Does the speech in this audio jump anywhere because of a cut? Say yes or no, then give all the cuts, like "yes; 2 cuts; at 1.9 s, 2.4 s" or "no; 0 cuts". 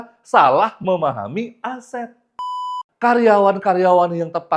yes; 1 cut; at 2.6 s